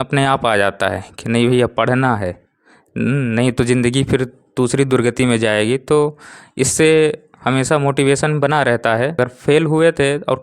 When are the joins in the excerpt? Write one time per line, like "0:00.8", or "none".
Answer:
0:09.1